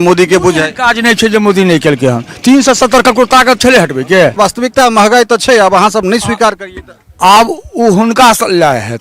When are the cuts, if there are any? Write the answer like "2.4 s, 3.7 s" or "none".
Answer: 4.3 s